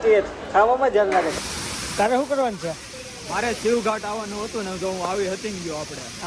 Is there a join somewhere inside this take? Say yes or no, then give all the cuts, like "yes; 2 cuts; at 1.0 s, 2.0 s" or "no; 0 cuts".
yes; 1 cut; at 1.4 s